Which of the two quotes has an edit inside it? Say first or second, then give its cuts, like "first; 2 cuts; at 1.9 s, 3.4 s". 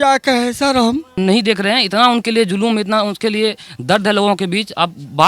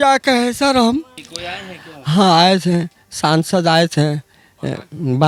first; 1 cut; at 1.1 s